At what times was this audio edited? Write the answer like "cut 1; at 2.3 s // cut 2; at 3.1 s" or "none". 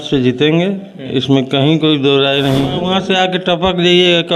cut 1; at 2.8 s